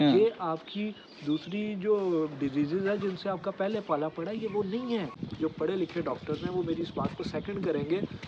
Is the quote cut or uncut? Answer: cut